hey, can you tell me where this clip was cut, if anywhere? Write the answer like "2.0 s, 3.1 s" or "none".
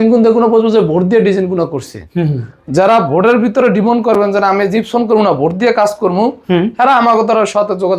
none